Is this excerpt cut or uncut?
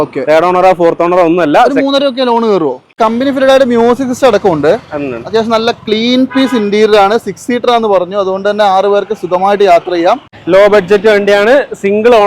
cut